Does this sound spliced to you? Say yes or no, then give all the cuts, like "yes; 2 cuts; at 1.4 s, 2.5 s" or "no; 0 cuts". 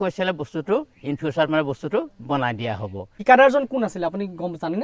yes; 1 cut; at 3.1 s